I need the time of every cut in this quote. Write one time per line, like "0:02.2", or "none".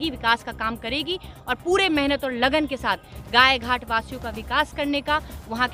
none